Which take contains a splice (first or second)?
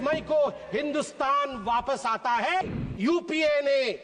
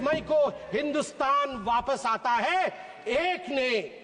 first